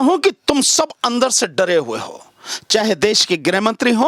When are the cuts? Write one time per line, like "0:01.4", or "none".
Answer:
none